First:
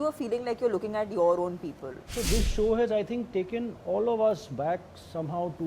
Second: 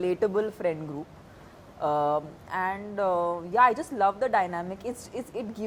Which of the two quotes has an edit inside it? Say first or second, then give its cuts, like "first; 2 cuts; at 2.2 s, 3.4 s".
first; 1 cut; at 2.0 s